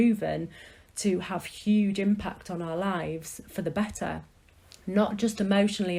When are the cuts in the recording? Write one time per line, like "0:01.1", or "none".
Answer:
none